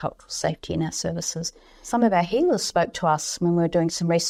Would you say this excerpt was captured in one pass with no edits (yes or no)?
yes